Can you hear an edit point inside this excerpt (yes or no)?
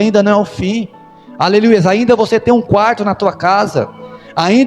no